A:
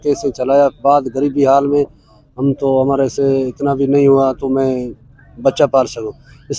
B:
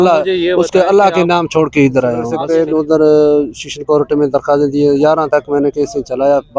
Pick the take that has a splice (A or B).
B